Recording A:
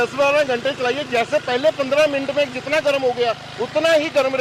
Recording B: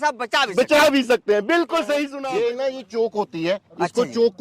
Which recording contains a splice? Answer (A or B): B